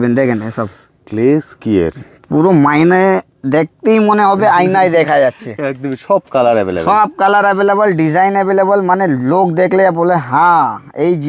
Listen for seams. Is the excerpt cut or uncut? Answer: uncut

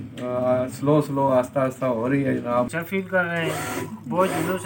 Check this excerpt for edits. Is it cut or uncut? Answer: cut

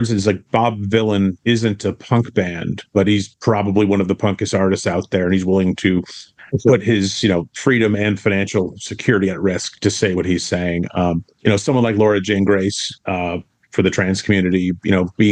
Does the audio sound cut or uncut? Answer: uncut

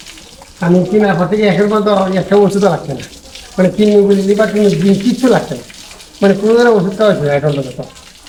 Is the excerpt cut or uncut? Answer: uncut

